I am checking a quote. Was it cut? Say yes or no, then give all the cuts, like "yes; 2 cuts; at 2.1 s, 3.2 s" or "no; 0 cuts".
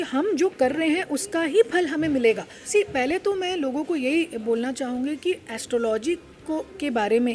yes; 1 cut; at 2.5 s